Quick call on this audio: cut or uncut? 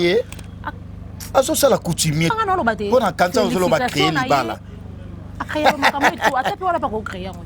cut